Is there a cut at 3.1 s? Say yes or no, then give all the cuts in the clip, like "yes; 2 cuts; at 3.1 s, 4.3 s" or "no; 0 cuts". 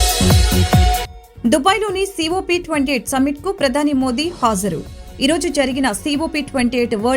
no; 1 cut; at 1.2 s